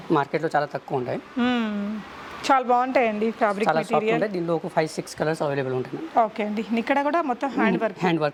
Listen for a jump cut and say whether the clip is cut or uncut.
uncut